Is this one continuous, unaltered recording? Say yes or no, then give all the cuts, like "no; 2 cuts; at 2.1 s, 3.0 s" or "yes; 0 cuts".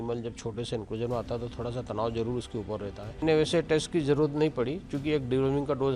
no; 1 cut; at 3.2 s